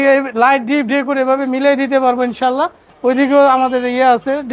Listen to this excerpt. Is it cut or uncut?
uncut